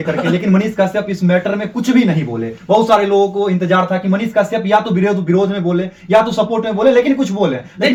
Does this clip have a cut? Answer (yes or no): no